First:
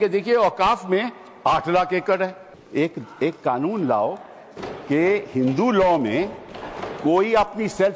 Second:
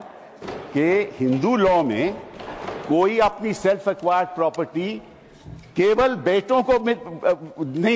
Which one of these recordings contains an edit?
first; 1 cut; at 2.6 s

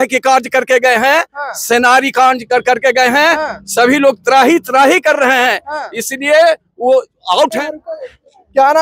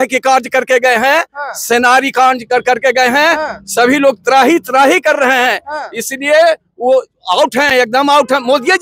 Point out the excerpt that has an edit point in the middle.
first; 1 cut; at 7.6 s

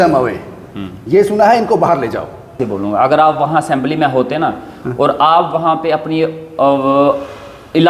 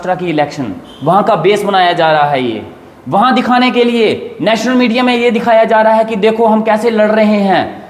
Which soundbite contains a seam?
first; 1 cut; at 2.6 s

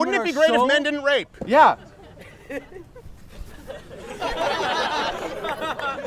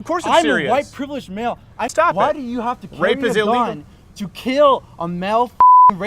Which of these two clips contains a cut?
second; 1 cut; at 1.8 s

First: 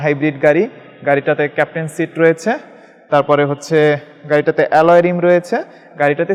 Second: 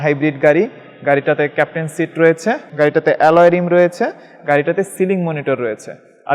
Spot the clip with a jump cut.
second; 1 cut; at 2.7 s

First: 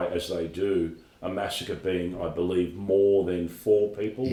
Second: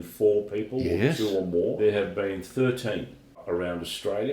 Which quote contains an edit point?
second; 2 cuts; at 1.8 s, 3.4 s

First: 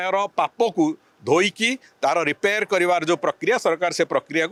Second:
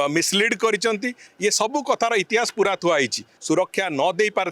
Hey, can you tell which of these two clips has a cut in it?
second; 1 cut; at 3.3 s

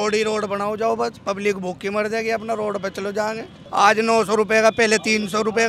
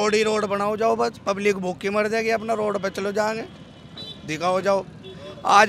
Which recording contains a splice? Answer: first; 1 cut; at 3.5 s

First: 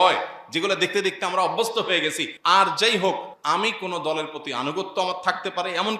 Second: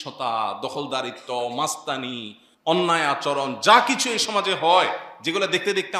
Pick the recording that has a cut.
first; 2 cuts; at 2.3 s, 3.3 s

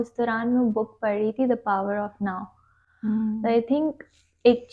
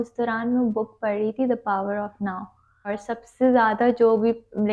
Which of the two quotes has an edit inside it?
second; 1 cut; at 2.9 s

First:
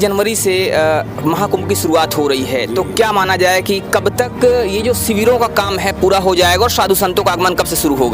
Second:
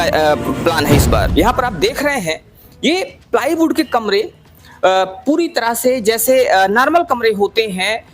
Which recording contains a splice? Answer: second; 1 cut; at 1.3 s

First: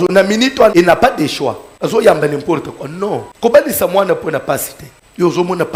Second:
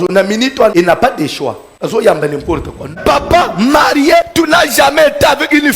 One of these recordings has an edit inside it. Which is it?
second; 1 cut; at 2.9 s

